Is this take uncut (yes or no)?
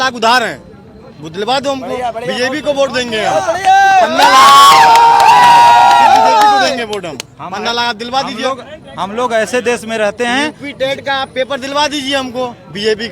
yes